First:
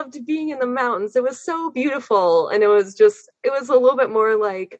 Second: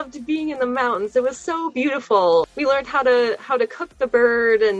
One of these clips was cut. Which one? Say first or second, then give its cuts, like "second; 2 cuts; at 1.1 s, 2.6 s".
second; 1 cut; at 2.5 s